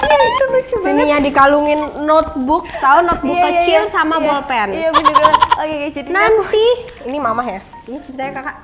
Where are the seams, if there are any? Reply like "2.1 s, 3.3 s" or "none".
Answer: 4.8 s, 5.6 s